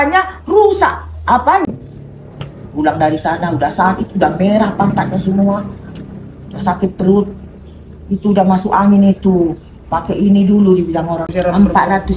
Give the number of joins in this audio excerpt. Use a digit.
2